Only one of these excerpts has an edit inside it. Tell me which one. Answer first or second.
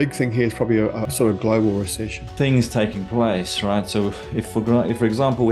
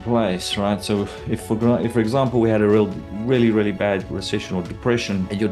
first